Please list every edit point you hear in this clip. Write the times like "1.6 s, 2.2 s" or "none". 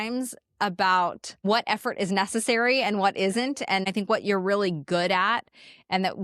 1.3 s, 3.8 s